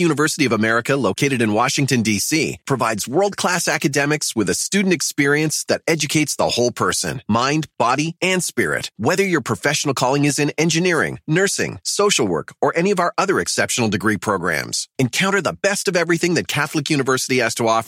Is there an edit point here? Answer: no; 0 cuts

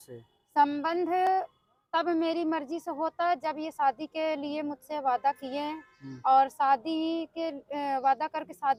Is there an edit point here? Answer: no; 0 cuts

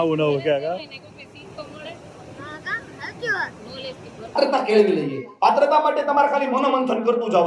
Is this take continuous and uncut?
no; 1 cut; at 4.3 s

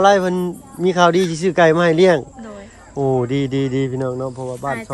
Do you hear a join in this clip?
no; 0 cuts

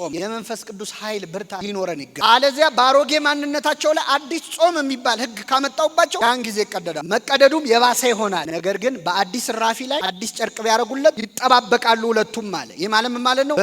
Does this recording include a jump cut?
no; 0 cuts

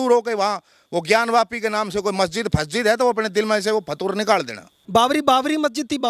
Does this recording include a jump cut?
yes; 1 cut; at 4.7 s

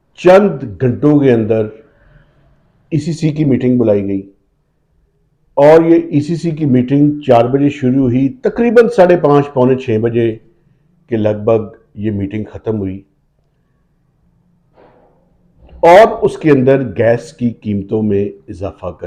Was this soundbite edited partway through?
no; 0 cuts

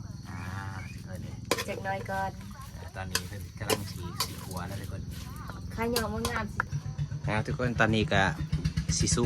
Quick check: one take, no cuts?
no; 1 cut; at 6.7 s

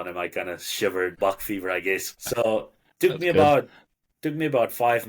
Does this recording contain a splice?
yes; 2 cuts; at 1.2 s, 2.2 s

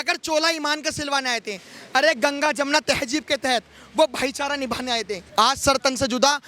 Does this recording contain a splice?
yes; 1 cut; at 5.2 s

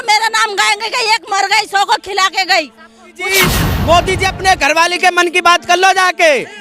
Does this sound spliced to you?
yes; 1 cut; at 3.3 s

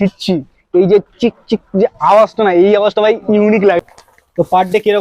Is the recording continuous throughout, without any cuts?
no; 1 cut; at 3.8 s

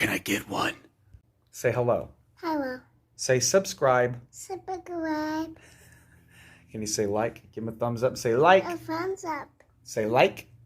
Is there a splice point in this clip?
yes; 1 cut; at 1.3 s

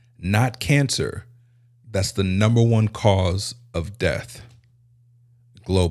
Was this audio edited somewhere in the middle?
no; 0 cuts

